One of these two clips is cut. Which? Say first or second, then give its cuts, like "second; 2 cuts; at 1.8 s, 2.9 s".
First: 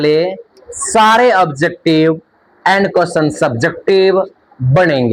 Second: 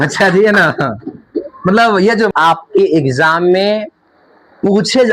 second; 1 cut; at 2.3 s